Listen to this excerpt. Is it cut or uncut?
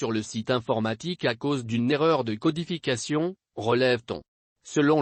uncut